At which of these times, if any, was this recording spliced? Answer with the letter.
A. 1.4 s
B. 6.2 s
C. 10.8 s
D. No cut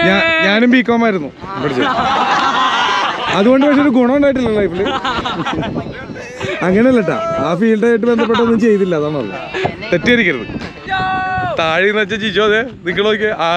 C